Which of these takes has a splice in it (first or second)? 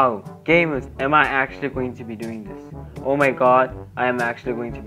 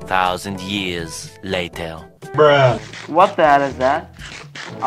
second